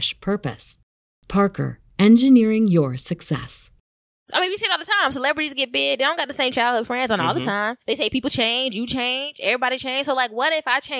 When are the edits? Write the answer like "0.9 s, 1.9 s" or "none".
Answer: 4.3 s